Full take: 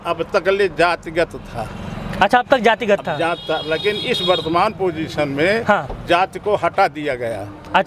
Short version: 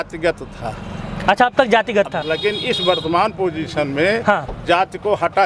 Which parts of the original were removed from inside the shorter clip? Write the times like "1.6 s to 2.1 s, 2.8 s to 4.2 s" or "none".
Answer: 3.2 s to 3.6 s